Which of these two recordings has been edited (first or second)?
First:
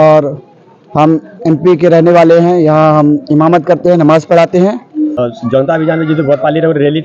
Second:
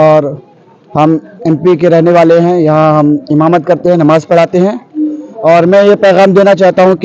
first